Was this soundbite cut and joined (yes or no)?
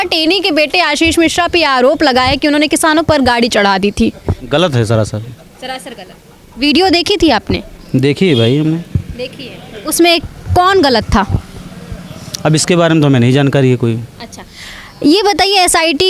no